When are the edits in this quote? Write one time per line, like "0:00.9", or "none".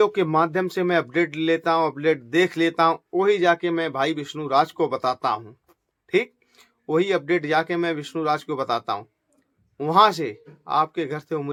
none